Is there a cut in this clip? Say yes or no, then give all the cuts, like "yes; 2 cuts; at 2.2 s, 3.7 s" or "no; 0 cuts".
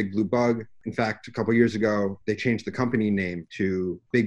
yes; 2 cuts; at 2.2 s, 3.4 s